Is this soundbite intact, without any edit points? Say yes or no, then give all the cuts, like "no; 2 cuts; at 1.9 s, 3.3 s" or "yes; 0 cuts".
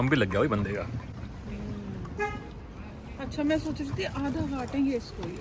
yes; 0 cuts